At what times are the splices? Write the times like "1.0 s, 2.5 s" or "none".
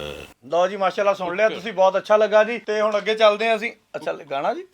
2.6 s